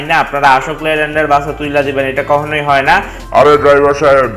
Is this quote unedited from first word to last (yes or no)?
no